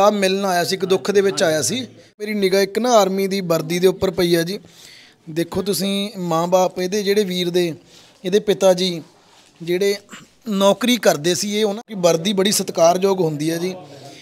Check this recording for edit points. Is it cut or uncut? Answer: cut